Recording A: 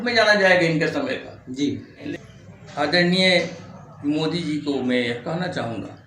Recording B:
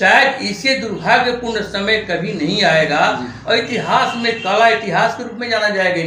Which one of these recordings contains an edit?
A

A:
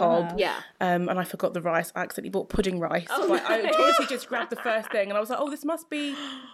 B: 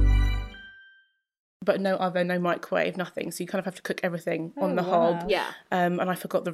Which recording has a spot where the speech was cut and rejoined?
B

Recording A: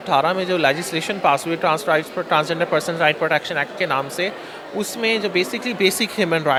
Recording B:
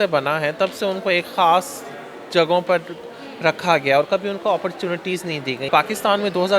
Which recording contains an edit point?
B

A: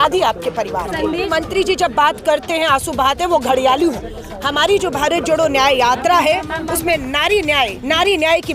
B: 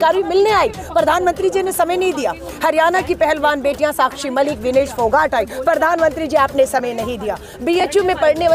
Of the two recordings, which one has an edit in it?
A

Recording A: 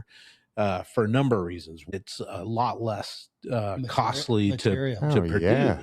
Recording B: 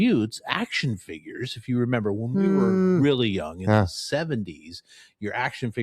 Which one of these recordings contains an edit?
A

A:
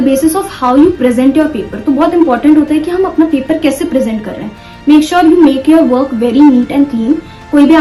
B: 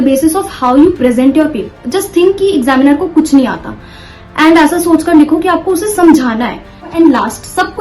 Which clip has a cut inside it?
B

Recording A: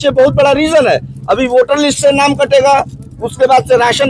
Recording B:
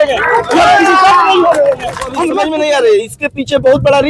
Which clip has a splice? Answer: B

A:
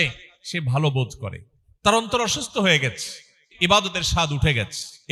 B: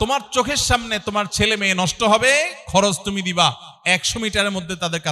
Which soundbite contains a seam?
A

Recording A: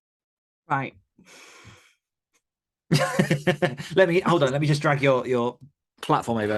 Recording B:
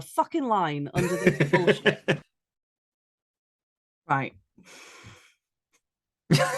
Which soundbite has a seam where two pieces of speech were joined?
B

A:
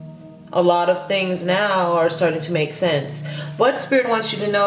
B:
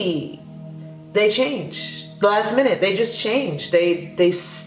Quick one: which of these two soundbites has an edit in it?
B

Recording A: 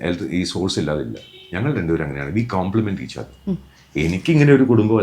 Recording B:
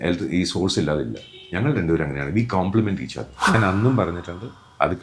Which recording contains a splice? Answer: B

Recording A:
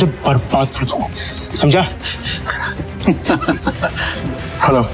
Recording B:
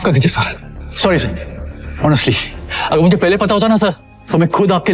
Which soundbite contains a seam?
A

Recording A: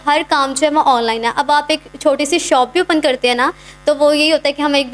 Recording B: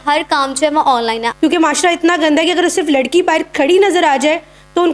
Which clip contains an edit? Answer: B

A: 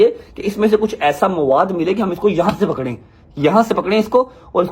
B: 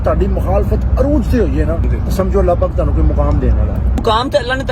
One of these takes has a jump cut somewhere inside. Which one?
B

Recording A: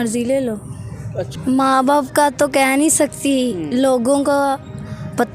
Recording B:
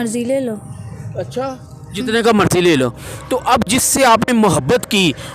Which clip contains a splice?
A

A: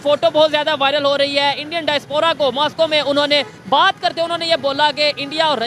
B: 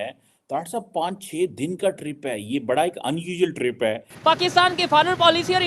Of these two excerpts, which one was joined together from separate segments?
B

